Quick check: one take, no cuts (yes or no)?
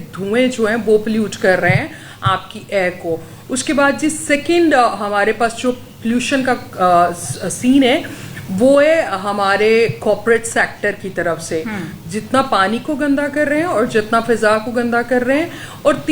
yes